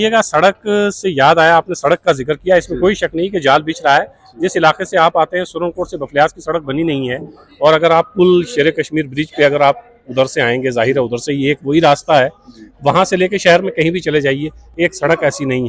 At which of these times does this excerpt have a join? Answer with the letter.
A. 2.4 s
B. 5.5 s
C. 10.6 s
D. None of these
D